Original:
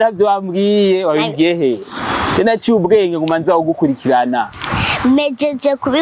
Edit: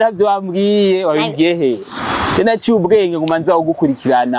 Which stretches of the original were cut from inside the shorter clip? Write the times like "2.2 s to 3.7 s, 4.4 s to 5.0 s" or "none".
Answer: none